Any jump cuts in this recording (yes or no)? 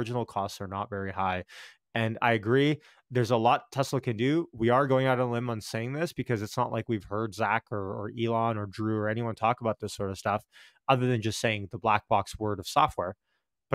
no